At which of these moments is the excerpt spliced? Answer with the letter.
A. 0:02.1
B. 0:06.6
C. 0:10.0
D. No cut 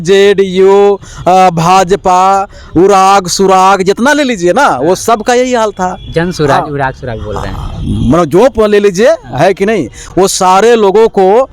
D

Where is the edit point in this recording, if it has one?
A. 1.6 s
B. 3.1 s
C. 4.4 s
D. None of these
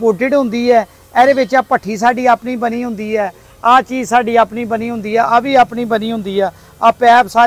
D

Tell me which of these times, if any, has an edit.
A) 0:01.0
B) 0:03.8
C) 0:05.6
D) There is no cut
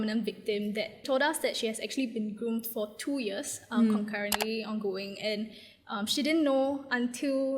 A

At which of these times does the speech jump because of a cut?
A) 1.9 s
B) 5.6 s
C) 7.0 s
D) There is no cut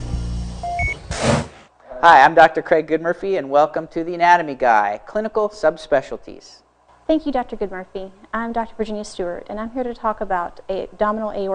C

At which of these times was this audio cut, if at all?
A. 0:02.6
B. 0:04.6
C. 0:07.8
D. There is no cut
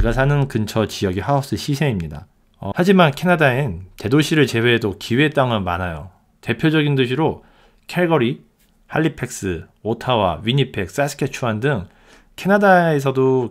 A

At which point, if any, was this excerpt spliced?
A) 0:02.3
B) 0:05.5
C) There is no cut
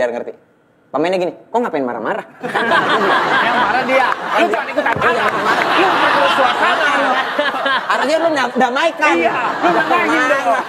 C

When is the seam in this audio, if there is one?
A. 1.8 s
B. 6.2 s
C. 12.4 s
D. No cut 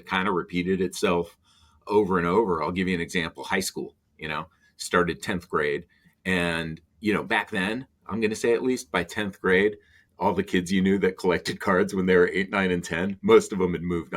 A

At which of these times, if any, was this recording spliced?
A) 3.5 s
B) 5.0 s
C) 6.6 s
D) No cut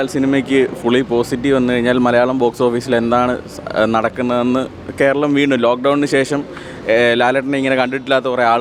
D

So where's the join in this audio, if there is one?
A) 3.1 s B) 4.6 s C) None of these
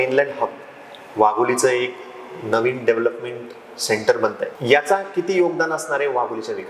B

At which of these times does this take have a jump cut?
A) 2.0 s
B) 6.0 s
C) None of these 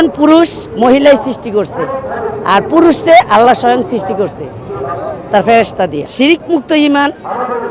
B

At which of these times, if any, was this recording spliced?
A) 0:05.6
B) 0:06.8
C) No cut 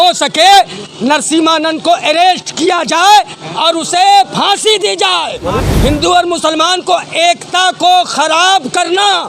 A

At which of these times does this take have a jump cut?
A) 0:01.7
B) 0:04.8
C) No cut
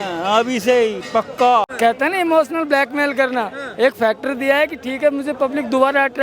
A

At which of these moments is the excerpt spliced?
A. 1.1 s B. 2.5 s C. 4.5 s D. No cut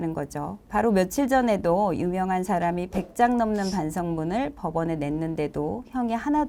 D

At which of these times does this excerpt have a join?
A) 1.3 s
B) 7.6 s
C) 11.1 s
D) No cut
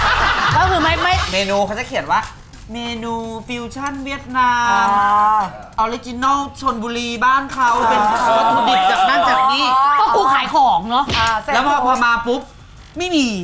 A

